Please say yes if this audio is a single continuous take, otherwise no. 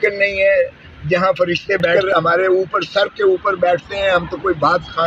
no